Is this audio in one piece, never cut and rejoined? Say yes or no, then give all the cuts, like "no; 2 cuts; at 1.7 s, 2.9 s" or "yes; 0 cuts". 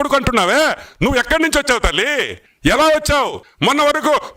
no; 2 cuts; at 2.4 s, 3.4 s